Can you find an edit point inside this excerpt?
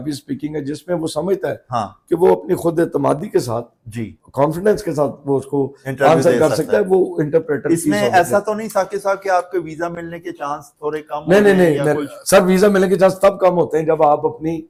no; 0 cuts

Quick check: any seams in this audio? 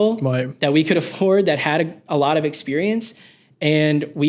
no; 0 cuts

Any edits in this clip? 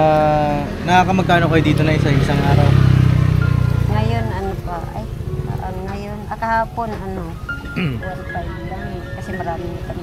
no; 0 cuts

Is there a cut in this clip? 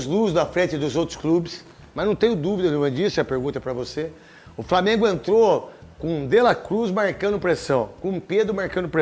no; 0 cuts

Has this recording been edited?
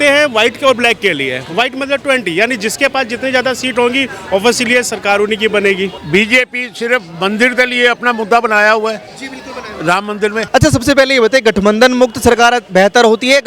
yes; 2 cuts; at 6.0 s, 10.4 s

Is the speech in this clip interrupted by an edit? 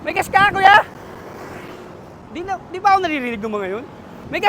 yes; 1 cut; at 2.2 s

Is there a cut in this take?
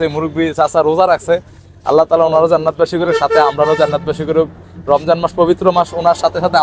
no; 0 cuts

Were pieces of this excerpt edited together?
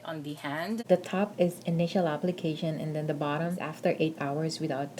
yes; 2 cuts; at 0.8 s, 3.7 s

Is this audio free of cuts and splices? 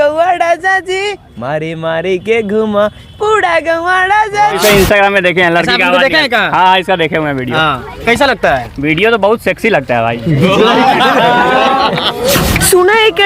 no; 2 cuts; at 4.6 s, 12.4 s

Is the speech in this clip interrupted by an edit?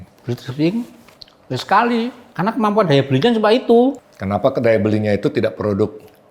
yes; 2 cuts; at 2.2 s, 4.0 s

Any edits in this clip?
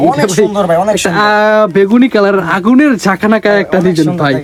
no; 0 cuts

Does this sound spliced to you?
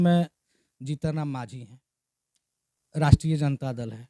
no; 0 cuts

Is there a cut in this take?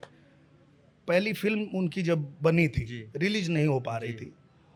no; 0 cuts

